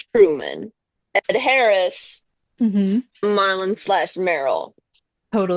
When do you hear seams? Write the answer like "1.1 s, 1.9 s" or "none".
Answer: none